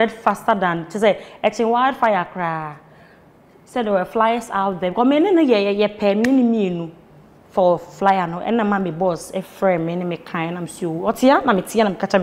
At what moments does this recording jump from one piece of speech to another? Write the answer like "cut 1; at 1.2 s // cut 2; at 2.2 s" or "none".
none